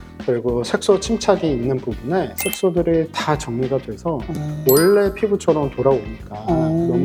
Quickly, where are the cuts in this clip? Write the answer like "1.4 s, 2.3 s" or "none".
none